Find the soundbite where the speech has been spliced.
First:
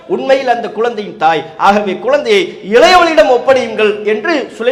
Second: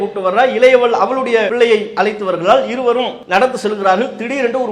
second; 2 cuts; at 1.5 s, 3.2 s

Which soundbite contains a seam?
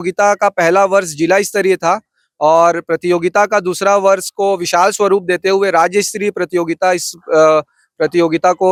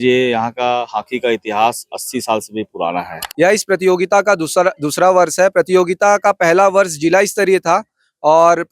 second; 1 cut; at 3.2 s

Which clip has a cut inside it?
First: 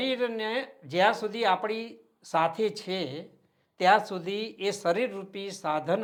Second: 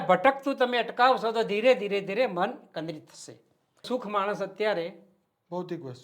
second; 1 cut; at 3.8 s

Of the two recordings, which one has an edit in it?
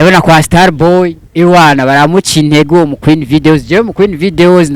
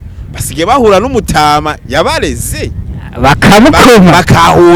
first; 1 cut; at 1.2 s

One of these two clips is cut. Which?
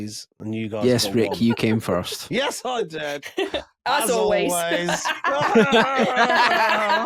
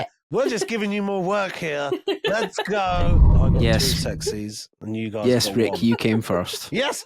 second; 1 cut; at 3.4 s

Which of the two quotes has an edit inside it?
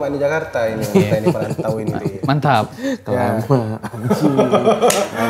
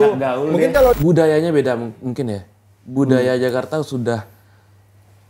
second; 1 cut; at 1.0 s

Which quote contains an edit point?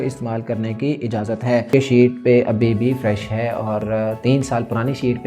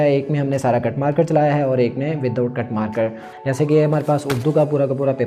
first; 1 cut; at 1.7 s

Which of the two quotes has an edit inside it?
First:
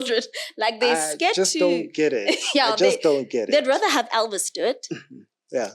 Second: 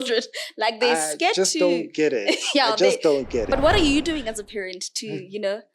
second; 1 cut; at 3.5 s

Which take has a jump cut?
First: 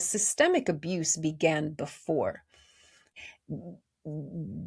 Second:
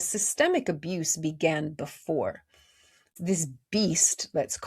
second; 1 cut; at 3.1 s

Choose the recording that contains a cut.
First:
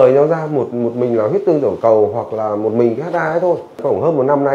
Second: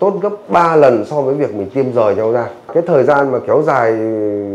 second; 1 cut; at 2.7 s

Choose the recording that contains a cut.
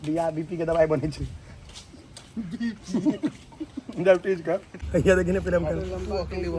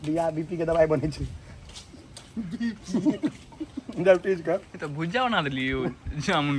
first; 1 cut; at 4.7 s

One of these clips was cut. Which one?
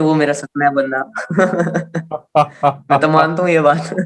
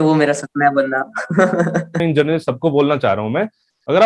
second; 1 cut; at 2.0 s

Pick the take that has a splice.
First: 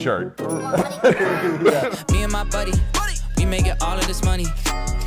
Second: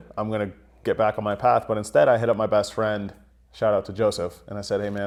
first; 1 cut; at 2.0 s

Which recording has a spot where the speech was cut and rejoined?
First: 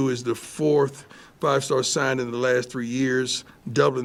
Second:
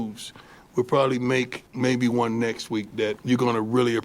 second; 2 cuts; at 1.6 s, 3.2 s

